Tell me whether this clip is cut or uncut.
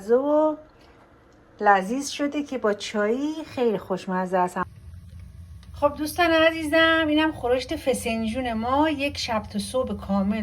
cut